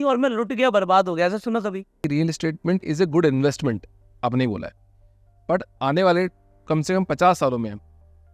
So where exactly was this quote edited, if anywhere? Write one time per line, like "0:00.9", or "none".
0:02.0